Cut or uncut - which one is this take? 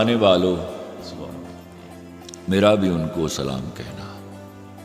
cut